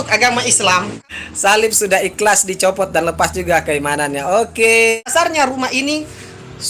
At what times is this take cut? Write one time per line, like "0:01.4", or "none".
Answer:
0:00.9
0:05.1